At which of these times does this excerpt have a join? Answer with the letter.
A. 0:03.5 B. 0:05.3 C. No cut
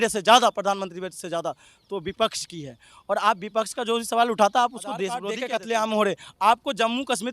B